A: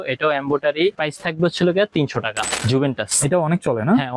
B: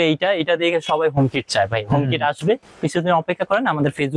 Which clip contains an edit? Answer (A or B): A